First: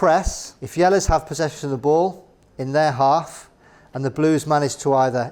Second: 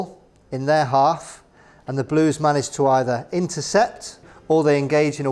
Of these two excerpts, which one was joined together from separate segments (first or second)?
second